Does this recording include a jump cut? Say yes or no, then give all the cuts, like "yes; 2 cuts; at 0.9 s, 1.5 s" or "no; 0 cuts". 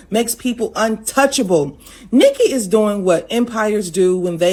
no; 0 cuts